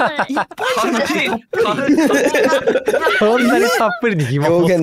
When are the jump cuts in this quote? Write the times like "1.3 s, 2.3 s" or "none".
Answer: none